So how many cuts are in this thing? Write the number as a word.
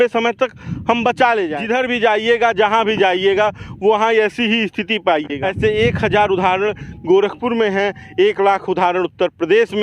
two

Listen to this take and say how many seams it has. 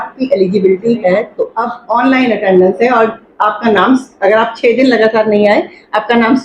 one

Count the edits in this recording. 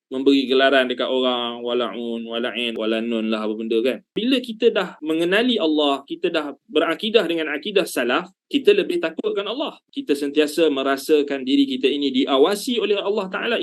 three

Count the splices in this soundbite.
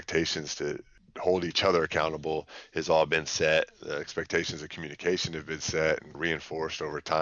two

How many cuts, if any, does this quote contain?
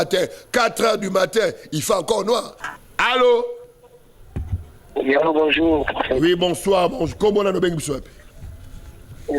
one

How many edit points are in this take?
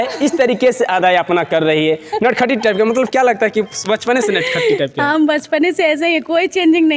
zero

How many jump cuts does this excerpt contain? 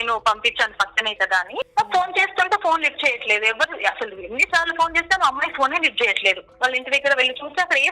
two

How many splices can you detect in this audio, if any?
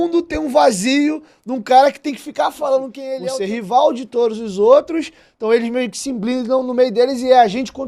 one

